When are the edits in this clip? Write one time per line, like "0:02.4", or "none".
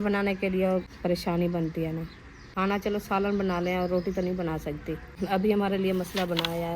0:00.9
0:02.5
0:05.1